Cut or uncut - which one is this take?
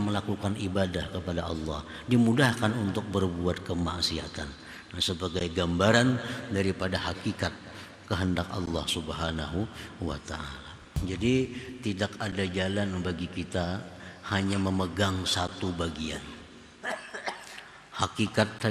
cut